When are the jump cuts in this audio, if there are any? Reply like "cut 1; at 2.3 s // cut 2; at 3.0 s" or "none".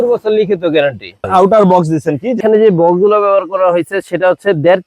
cut 1; at 1.3 s // cut 2; at 2.4 s